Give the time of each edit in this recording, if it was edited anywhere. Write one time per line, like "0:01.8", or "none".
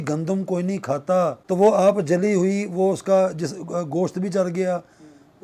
0:01.4